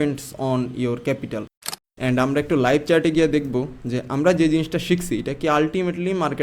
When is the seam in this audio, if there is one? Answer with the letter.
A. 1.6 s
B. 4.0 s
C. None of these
A